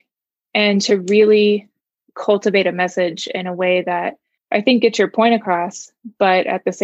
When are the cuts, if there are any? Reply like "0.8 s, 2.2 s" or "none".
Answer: none